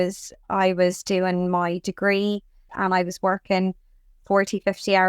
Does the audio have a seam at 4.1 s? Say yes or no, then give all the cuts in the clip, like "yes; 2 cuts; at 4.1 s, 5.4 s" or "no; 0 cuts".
no; 1 cut; at 2.6 s